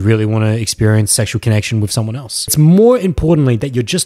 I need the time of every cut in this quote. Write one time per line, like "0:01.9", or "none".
0:02.5